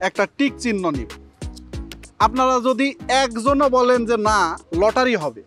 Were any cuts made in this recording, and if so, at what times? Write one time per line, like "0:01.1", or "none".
none

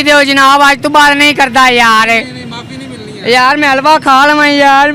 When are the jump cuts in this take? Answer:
none

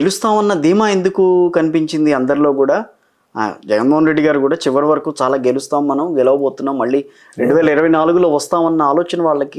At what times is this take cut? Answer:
none

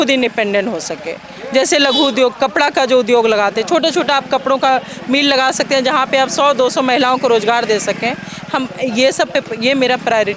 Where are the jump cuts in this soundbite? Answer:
none

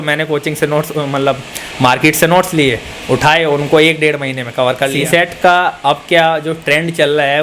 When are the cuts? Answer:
0:05.0

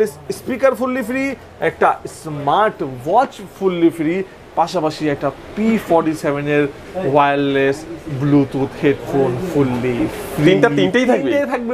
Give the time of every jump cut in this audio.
none

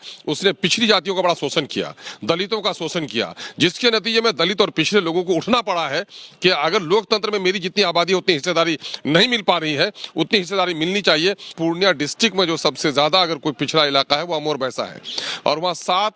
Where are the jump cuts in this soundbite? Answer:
0:11.5

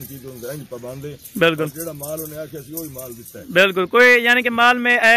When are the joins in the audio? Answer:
none

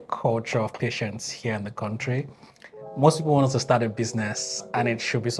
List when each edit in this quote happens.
none

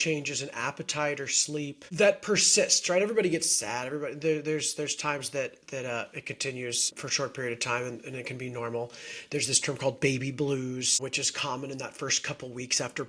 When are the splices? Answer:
0:01.8
0:06.9
0:11.0

